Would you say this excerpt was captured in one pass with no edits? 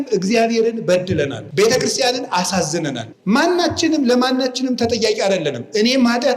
no; 2 cuts; at 1.4 s, 3.1 s

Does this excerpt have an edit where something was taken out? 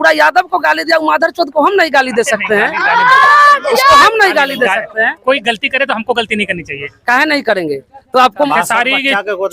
yes; 1 cut; at 8.5 s

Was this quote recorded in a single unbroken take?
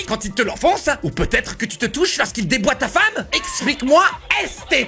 yes; 0 cuts

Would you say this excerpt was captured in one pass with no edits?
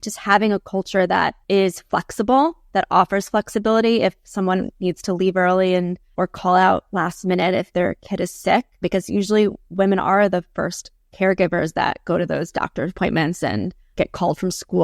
no; 4 cuts; at 1.4 s, 6.1 s, 8.8 s, 13.8 s

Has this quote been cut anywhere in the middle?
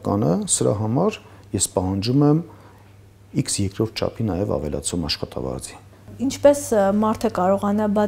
yes; 1 cut; at 6.1 s

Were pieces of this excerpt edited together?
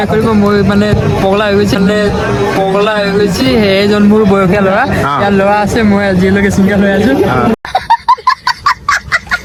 no; 0 cuts

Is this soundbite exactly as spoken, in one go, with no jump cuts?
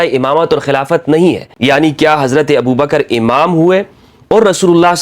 no; 1 cut; at 1.5 s

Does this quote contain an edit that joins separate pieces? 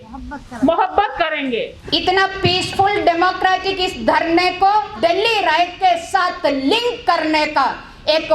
yes; 2 cuts; at 1.7 s, 4.9 s

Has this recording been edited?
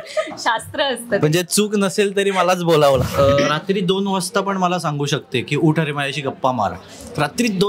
yes; 1 cut; at 3.1 s

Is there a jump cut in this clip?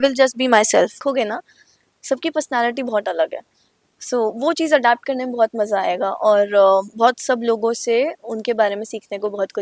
yes; 1 cut; at 1.0 s

